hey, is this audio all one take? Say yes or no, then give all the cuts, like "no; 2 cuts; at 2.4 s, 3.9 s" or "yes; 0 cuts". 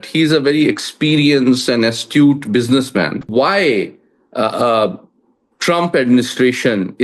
no; 1 cut; at 3.3 s